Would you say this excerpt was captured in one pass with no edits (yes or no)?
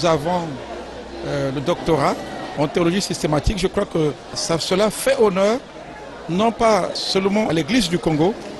no